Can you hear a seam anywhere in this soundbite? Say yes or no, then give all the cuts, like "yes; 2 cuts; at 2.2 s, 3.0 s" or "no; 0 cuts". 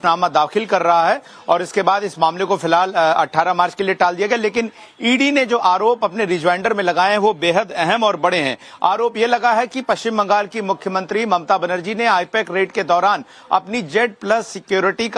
no; 0 cuts